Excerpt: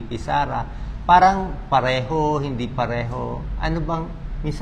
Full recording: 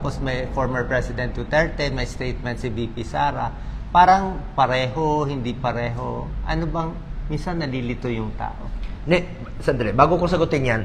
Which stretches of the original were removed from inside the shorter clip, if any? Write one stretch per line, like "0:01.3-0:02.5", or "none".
none